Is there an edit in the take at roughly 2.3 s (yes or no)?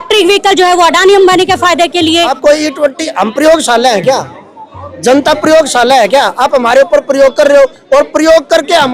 yes